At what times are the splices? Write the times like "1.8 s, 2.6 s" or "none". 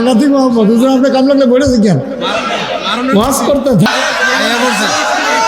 3.9 s